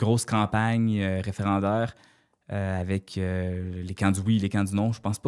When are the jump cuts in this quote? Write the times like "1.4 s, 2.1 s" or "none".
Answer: none

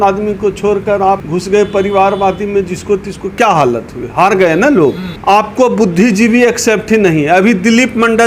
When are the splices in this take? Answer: 5.1 s

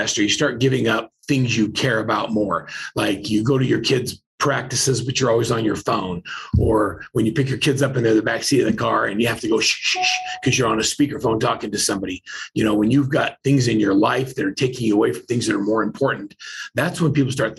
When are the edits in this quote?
none

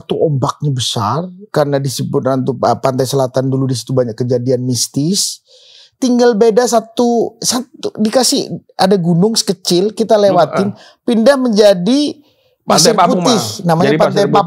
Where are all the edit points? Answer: none

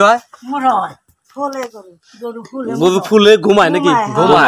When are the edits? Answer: none

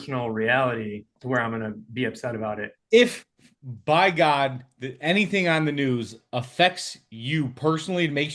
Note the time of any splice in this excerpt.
1.1 s, 2.7 s

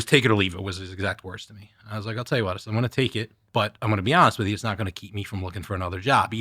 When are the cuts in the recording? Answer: 3.4 s

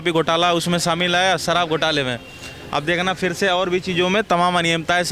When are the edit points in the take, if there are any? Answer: none

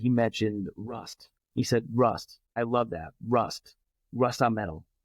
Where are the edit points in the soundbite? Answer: 2.6 s, 3.8 s

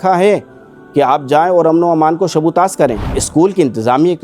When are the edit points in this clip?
3.2 s

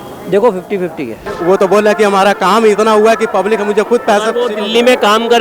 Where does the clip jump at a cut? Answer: 1.2 s

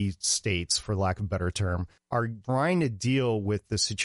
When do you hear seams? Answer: 2.2 s

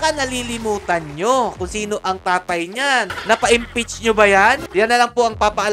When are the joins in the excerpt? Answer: 3.2 s, 4.7 s

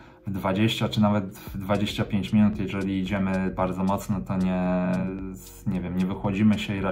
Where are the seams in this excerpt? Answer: none

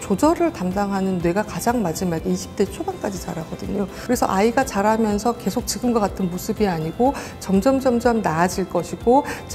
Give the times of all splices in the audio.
4.0 s

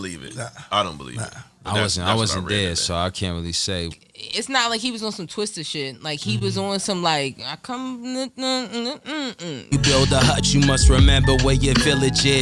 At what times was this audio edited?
3.9 s, 9.7 s

